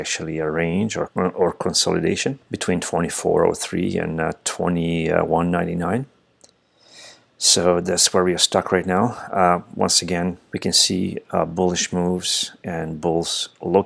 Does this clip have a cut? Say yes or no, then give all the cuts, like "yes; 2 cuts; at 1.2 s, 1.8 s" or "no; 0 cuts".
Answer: yes; 3 cuts; at 1.1 s, 2.5 s, 10.5 s